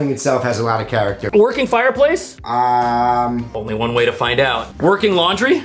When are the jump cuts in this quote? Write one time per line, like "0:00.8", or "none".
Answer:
0:01.2
0:03.5